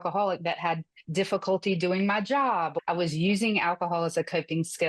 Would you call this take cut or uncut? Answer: cut